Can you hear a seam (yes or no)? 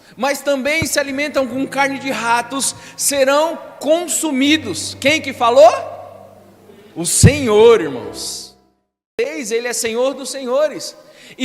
yes